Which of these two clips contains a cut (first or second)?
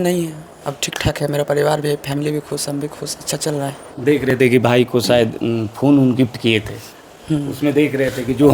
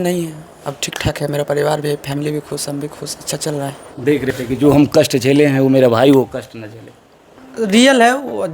second